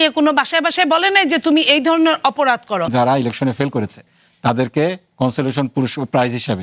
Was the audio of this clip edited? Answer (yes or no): yes